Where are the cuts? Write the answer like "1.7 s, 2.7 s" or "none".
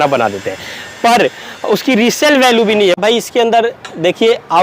3.0 s